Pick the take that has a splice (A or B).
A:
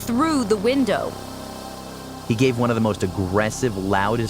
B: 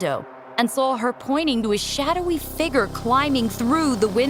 A